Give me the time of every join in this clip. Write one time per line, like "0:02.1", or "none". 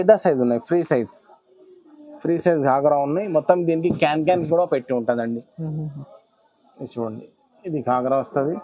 none